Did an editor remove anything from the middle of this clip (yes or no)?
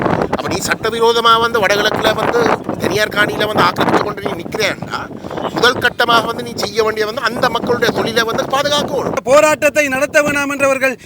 yes